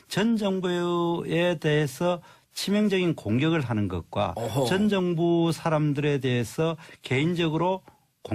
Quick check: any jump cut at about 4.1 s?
no; 1 cut; at 1.2 s

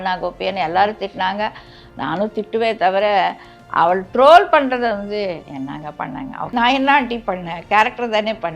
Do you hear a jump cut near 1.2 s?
no; 1 cut; at 6.5 s

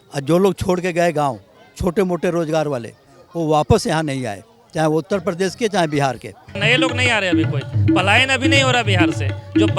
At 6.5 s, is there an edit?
yes; 1 cut; at 6.5 s

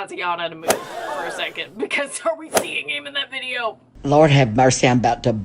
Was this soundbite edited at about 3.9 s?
yes; 1 cut; at 3.9 s

